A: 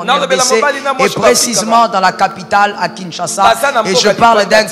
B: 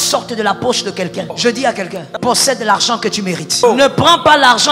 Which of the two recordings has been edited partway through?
B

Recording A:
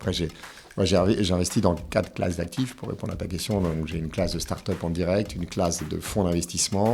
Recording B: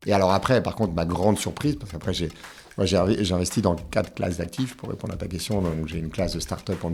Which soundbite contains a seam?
A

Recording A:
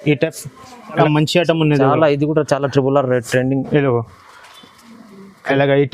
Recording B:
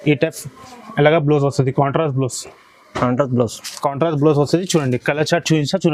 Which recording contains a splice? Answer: A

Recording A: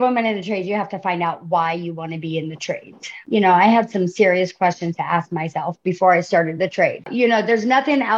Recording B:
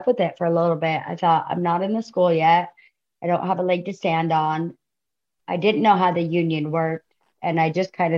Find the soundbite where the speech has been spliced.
A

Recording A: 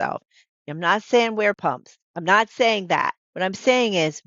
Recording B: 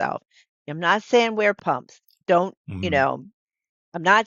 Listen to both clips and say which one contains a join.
A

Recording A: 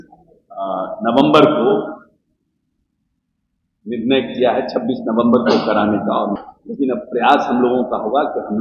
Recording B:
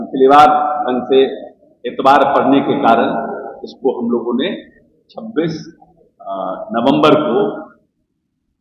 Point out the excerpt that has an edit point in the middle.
A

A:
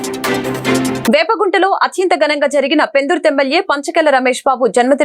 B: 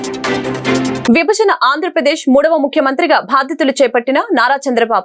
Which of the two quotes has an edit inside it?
A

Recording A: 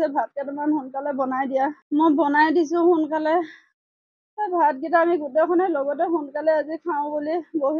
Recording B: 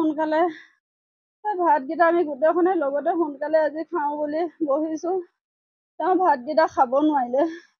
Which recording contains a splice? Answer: A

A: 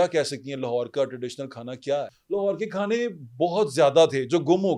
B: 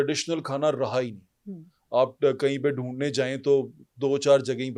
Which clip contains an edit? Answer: A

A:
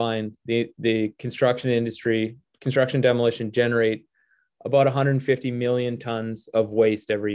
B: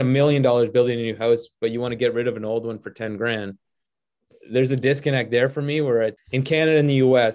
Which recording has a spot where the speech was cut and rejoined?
B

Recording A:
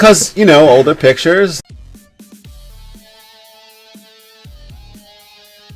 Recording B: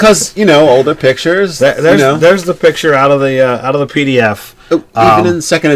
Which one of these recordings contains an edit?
B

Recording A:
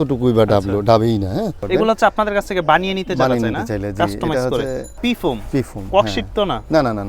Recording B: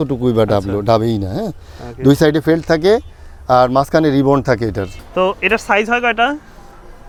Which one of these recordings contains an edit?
A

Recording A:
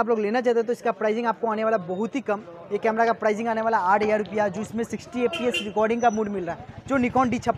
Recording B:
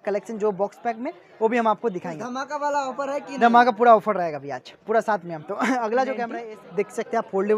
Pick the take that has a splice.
B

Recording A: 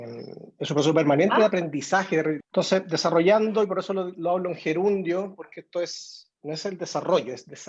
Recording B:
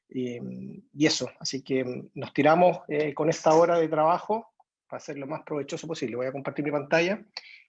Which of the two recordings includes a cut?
A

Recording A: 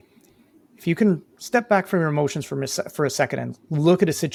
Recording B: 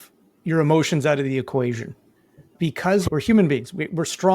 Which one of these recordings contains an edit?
B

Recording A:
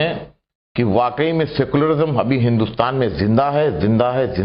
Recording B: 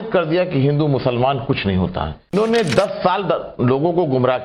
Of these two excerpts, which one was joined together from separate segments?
B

